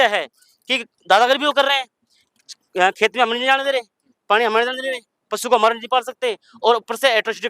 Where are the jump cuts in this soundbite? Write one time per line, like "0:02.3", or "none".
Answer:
none